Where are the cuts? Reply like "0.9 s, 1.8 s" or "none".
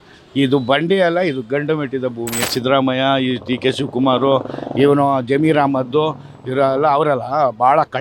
2.5 s